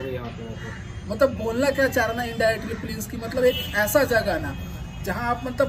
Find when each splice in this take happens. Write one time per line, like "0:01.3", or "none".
none